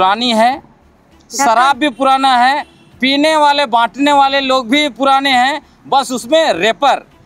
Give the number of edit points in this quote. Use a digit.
0